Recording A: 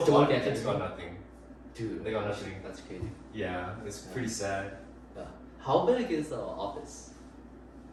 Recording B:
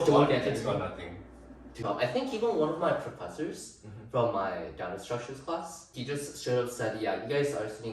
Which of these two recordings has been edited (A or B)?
B